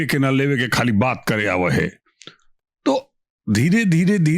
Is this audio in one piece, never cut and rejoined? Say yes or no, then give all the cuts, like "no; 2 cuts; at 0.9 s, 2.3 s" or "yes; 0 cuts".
yes; 0 cuts